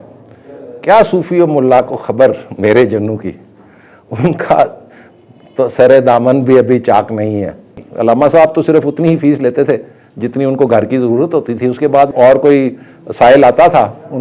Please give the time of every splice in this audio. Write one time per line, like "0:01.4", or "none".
0:07.8
0:12.1